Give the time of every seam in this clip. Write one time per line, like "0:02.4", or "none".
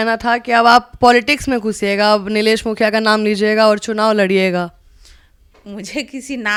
none